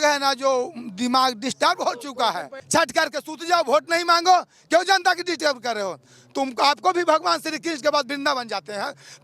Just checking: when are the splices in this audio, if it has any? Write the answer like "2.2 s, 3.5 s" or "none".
2.5 s